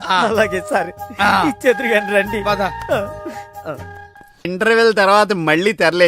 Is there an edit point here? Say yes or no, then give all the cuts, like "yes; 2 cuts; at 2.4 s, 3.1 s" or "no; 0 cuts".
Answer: yes; 1 cut; at 4.4 s